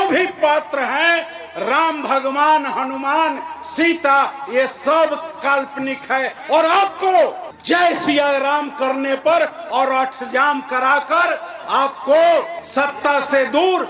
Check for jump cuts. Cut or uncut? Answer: uncut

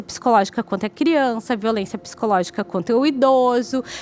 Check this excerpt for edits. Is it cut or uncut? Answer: uncut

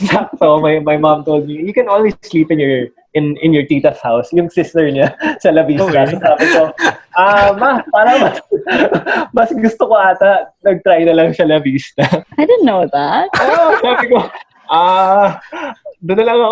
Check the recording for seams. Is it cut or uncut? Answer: cut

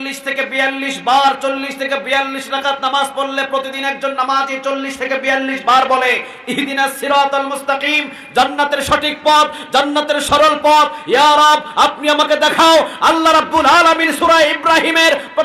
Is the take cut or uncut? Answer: uncut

